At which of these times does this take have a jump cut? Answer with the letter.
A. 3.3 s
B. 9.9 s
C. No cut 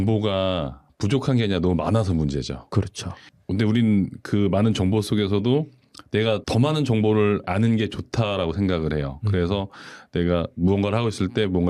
A